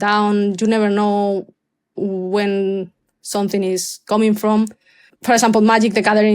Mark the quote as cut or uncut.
cut